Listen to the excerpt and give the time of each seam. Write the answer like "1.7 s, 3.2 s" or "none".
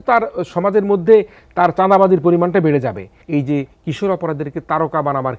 3.1 s